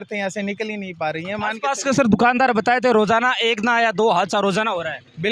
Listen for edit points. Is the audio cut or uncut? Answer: uncut